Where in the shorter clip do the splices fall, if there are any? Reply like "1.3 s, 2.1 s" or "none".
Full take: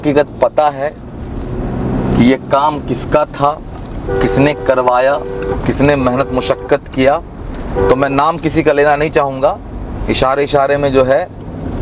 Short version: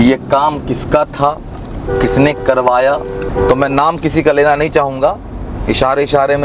3.2 s